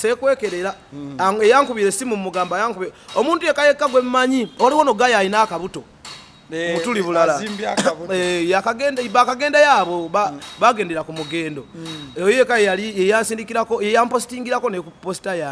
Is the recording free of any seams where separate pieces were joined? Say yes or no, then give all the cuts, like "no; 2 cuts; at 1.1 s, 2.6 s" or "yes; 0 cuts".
yes; 0 cuts